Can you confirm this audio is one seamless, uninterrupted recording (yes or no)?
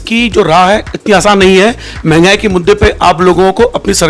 yes